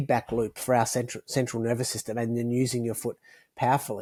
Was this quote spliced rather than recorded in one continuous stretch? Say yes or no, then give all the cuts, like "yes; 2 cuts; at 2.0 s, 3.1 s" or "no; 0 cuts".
no; 0 cuts